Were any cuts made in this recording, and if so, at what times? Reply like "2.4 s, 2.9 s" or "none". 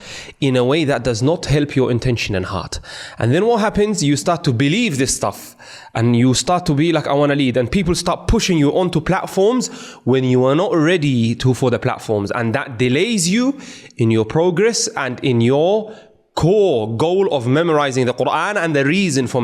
none